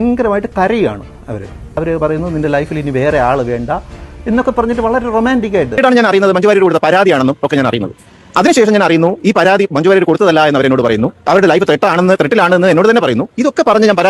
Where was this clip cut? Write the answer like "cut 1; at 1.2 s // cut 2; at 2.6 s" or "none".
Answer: cut 1; at 5.8 s